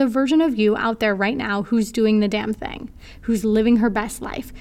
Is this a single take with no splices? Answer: yes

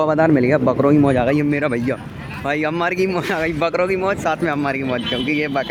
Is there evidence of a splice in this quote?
no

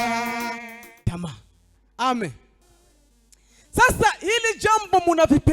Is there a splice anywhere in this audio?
yes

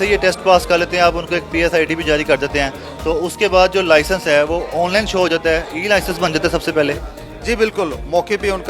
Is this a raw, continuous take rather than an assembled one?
yes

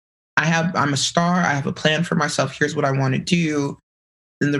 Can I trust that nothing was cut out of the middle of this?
yes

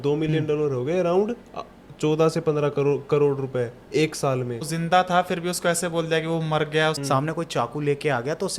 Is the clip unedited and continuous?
no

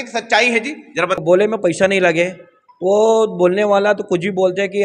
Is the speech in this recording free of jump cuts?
no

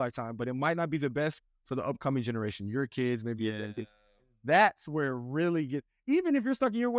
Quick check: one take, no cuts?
yes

